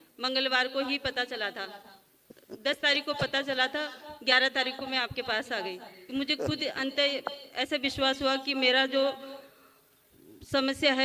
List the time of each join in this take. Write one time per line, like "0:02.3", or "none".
none